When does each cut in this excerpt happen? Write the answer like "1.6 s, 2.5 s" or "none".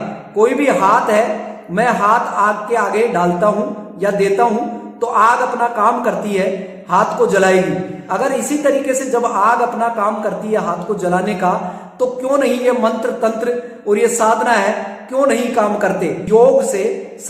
16.2 s